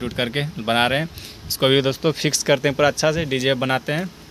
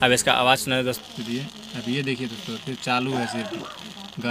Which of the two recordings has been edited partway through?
second; 1 cut; at 1.0 s

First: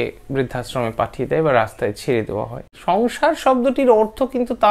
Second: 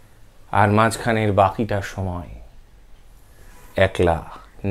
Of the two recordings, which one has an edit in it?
first; 1 cut; at 2.7 s

